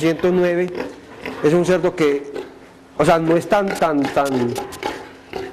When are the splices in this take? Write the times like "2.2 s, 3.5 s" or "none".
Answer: 3.5 s